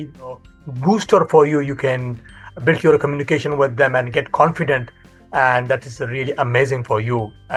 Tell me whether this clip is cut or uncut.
uncut